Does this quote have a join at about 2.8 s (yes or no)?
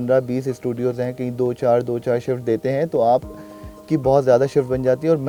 no